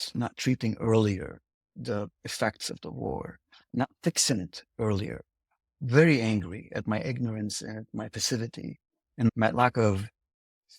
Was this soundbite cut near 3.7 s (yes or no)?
yes